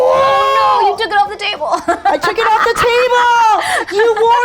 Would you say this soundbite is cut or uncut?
uncut